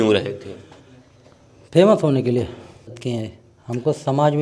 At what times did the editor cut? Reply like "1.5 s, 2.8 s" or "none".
3.0 s